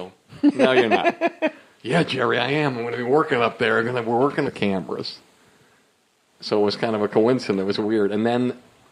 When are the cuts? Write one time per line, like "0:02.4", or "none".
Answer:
none